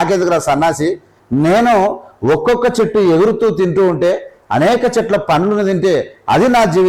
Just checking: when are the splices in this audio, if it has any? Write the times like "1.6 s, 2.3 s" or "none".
none